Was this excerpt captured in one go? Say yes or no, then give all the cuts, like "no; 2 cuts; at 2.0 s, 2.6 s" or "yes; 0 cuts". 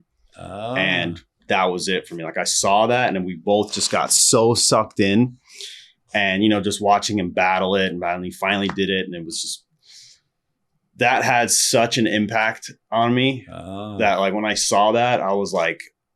yes; 0 cuts